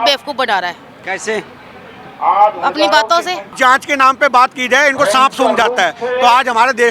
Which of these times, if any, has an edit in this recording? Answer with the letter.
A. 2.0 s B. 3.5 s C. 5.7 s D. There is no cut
B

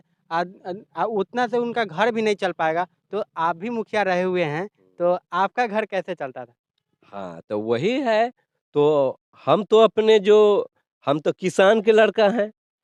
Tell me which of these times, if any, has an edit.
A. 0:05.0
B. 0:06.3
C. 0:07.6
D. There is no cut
D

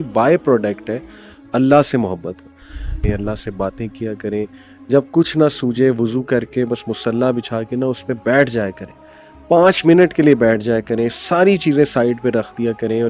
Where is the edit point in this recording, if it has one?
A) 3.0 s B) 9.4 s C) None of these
A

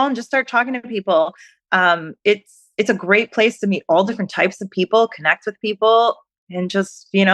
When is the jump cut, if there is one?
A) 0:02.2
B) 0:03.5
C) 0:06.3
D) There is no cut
C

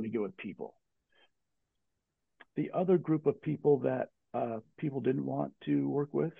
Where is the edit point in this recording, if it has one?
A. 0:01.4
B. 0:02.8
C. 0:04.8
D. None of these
A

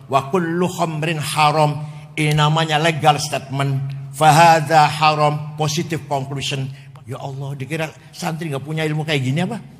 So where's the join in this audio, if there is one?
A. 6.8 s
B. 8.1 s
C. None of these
A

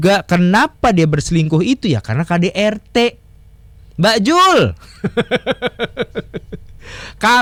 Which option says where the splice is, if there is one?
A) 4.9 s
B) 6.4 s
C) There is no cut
C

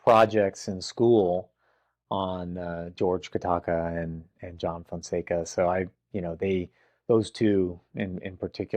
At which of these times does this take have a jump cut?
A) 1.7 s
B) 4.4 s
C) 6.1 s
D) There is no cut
D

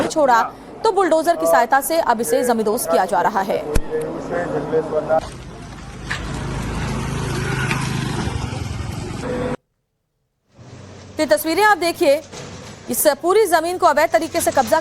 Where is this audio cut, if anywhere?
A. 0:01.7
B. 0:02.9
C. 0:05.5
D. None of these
A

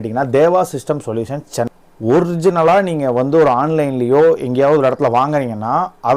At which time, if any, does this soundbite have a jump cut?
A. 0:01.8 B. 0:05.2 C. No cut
A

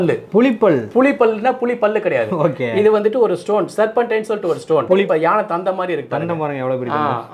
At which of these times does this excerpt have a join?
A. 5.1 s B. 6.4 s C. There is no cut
A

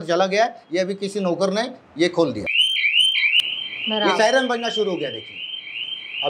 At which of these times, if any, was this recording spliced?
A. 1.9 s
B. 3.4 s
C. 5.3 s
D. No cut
D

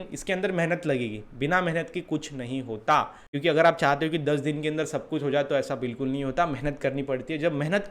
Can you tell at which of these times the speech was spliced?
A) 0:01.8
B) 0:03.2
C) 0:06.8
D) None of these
B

